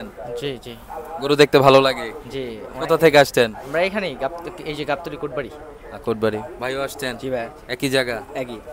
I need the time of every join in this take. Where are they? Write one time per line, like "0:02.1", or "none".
none